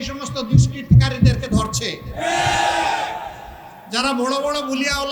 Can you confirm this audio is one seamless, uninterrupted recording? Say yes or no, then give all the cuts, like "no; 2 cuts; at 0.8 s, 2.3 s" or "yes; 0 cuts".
yes; 0 cuts